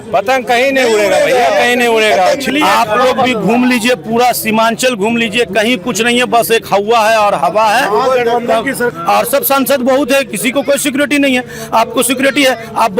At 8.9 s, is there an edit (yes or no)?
yes